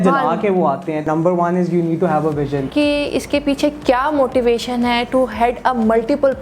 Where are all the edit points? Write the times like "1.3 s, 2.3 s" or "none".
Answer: 1.0 s, 2.7 s